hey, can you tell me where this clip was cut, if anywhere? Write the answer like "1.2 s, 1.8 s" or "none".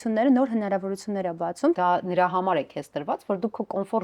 1.8 s